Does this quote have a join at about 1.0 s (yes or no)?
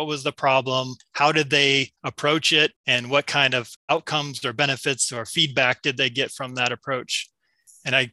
yes